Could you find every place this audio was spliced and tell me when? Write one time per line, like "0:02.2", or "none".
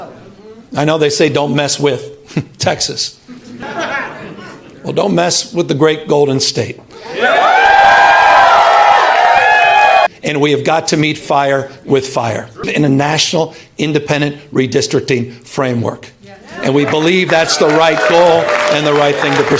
0:03.6
0:10.1
0:12.7